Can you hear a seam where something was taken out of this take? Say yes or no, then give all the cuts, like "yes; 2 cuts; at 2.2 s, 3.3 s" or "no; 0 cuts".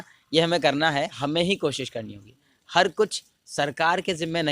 yes; 1 cut; at 1.2 s